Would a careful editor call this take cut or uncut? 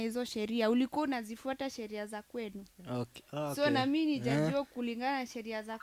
uncut